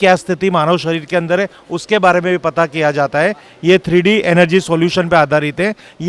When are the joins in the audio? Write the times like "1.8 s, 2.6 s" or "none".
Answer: none